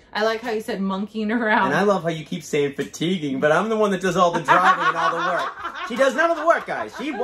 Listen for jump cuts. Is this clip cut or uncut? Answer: uncut